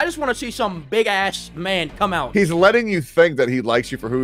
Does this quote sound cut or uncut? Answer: cut